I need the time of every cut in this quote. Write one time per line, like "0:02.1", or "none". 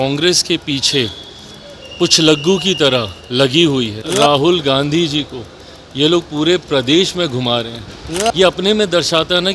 0:04.0